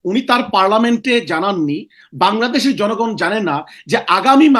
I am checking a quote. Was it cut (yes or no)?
no